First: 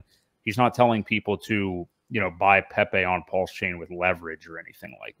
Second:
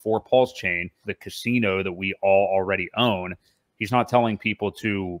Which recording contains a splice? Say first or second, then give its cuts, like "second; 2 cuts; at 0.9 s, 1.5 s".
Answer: second; 1 cut; at 1.1 s